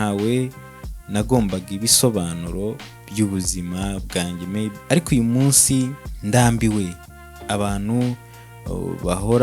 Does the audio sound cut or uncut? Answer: cut